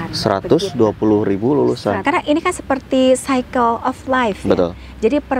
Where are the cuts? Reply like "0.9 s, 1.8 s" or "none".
2.0 s